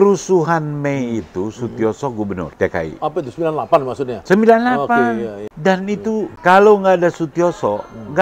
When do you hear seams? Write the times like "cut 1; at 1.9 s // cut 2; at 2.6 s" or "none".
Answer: cut 1; at 2.5 s // cut 2; at 5.5 s // cut 3; at 6.3 s